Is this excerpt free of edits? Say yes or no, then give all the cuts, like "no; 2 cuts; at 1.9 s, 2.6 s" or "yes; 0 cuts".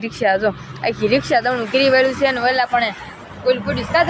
yes; 0 cuts